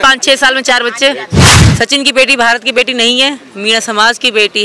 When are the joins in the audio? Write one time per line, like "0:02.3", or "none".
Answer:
0:01.6